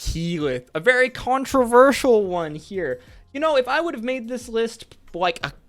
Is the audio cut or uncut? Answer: uncut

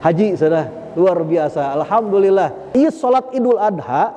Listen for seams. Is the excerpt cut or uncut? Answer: cut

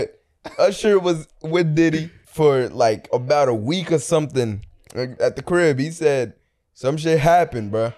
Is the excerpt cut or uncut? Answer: cut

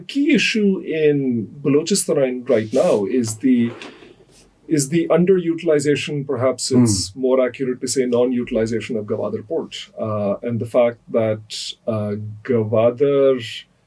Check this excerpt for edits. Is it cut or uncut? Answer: uncut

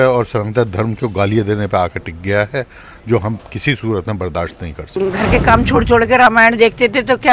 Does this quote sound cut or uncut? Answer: cut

